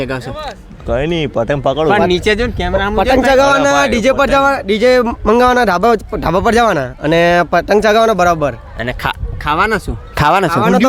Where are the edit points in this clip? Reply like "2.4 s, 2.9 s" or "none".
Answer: none

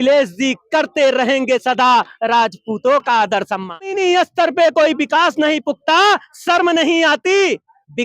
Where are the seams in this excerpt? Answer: 3.9 s

